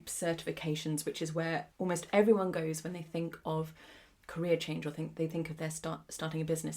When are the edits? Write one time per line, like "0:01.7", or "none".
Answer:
0:01.7